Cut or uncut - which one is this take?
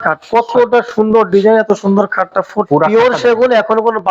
cut